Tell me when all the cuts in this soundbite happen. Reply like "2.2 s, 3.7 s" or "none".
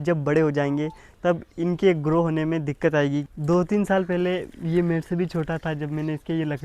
3.3 s